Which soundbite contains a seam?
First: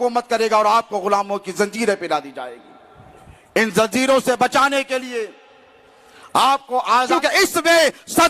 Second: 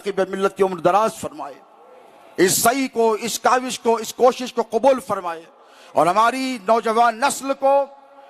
first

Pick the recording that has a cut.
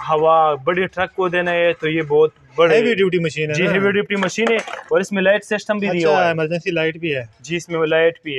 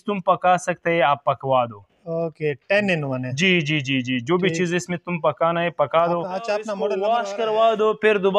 second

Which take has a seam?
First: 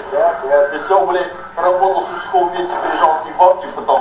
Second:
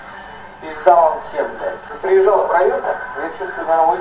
second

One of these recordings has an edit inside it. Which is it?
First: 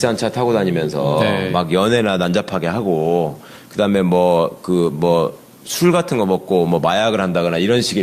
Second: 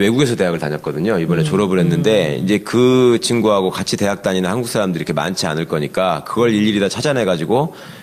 first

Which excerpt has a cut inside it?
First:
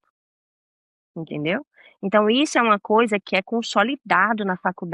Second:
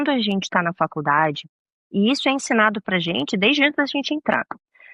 first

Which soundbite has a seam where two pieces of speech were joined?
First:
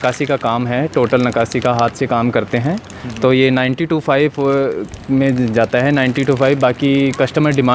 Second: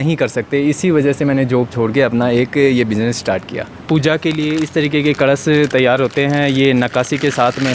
second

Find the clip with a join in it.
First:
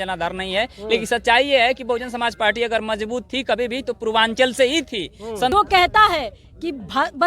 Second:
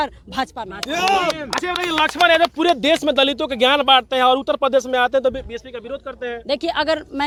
first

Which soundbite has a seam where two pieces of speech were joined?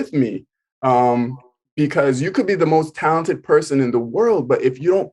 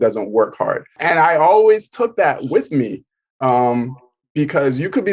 second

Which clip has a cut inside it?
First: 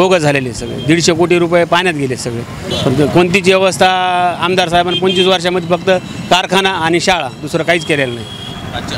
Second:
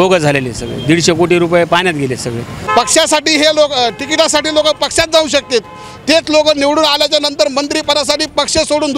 second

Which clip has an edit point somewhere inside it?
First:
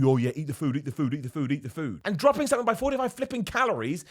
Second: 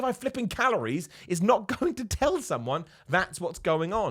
first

